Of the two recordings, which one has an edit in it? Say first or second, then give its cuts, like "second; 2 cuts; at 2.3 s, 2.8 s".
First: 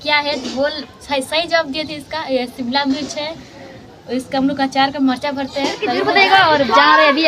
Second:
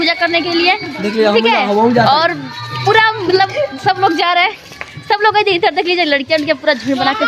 first; 1 cut; at 5.9 s